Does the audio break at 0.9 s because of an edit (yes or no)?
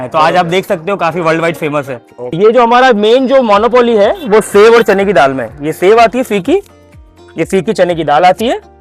no